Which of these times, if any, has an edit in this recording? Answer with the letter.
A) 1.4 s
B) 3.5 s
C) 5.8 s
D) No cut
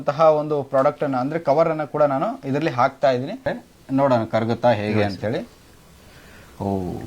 B